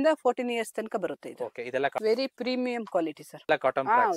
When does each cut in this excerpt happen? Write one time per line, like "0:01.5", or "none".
0:01.9
0:03.5